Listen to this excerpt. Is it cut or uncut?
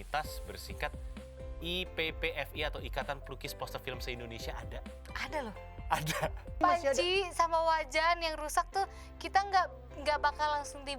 cut